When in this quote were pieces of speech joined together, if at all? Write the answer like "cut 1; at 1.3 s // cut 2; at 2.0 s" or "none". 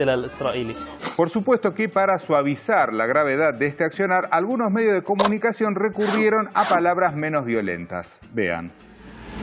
none